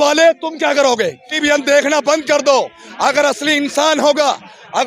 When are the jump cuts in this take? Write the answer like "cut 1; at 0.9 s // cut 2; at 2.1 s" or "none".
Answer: cut 1; at 1.4 s